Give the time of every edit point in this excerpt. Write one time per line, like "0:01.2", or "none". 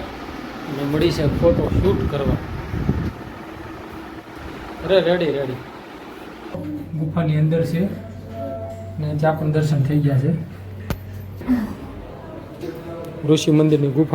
0:06.6